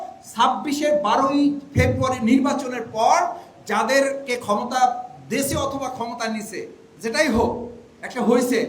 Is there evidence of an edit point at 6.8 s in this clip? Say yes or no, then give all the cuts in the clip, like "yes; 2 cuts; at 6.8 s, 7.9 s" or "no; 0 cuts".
yes; 1 cut; at 6.8 s